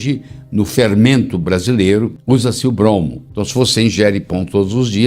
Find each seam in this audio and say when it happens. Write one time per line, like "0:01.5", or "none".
0:03.3